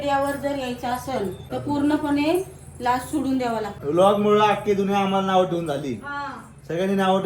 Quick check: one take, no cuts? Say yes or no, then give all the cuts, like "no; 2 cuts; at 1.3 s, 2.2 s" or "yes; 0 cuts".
no; 2 cuts; at 1.4 s, 3.7 s